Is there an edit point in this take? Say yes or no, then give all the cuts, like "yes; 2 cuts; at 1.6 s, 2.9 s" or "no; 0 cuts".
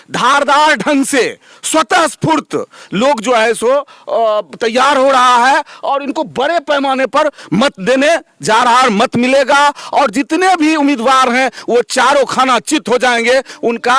no; 0 cuts